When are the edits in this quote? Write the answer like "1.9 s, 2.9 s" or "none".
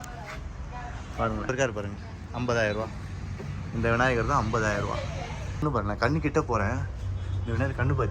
1.5 s, 5.6 s